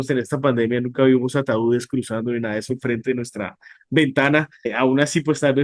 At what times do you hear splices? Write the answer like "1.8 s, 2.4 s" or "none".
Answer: 4.7 s

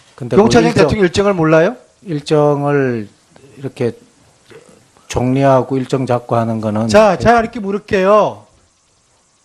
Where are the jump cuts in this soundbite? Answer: 7.0 s

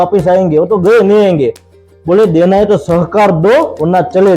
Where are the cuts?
none

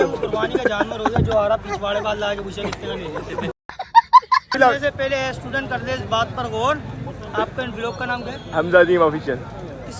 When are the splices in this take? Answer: 4.5 s

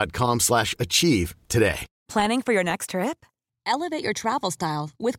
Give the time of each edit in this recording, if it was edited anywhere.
1.9 s

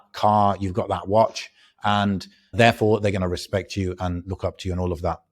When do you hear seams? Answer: 2.5 s

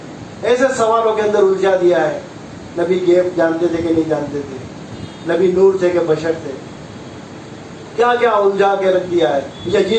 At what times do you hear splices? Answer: none

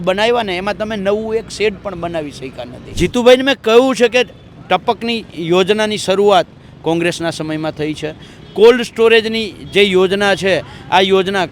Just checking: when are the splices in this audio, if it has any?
2.9 s

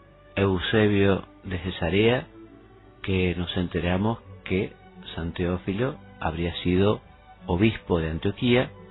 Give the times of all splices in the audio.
1.8 s

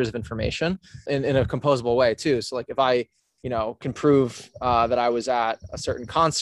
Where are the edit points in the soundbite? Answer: 1.1 s

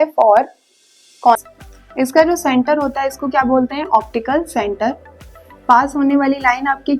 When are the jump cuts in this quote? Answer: 1.3 s

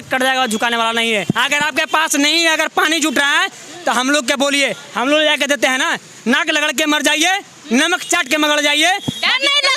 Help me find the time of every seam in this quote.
1.2 s

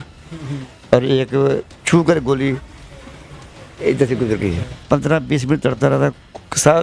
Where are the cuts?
4.8 s

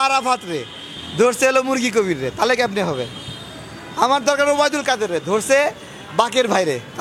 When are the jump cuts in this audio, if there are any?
none

